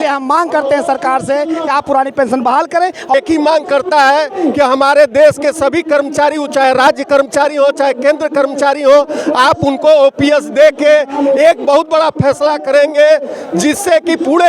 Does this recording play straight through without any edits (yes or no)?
no